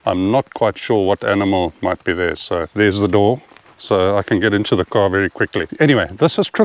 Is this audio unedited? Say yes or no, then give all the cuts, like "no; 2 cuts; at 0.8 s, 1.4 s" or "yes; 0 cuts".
no; 2 cuts; at 2.7 s, 5.6 s